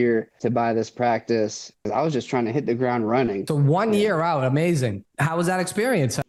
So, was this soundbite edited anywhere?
no; 0 cuts

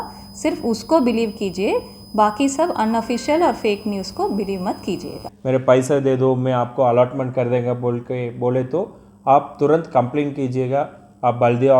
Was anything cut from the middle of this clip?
yes; 1 cut; at 5.3 s

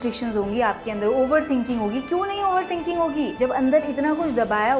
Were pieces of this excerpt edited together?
no; 0 cuts

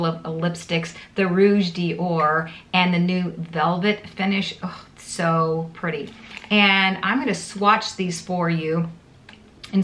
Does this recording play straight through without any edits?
no; 1 cut; at 6.3 s

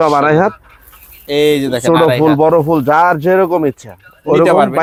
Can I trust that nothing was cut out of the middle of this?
yes; 0 cuts

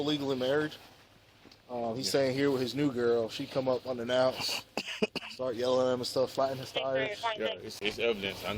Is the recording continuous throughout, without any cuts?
yes; 0 cuts

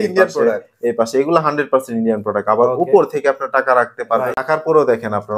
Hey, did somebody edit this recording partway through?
yes; 1 cut; at 4.4 s

